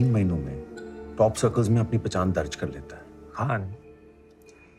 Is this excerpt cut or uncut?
uncut